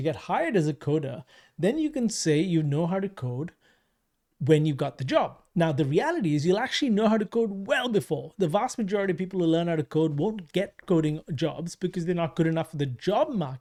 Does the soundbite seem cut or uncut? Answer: uncut